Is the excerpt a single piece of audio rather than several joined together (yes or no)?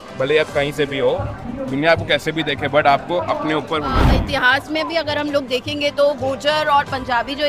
no